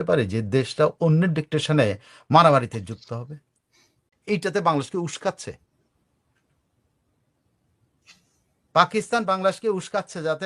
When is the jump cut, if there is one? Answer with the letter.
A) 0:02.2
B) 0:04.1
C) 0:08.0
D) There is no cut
B